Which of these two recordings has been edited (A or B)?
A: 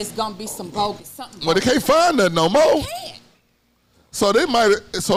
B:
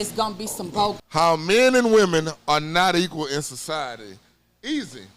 B